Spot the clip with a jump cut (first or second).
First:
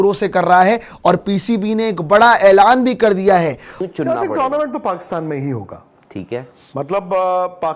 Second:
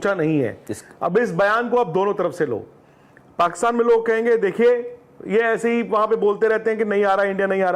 first